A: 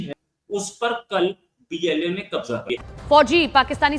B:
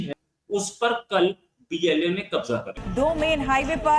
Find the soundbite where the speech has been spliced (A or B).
A